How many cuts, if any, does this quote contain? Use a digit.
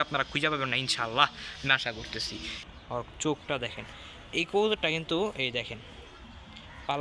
1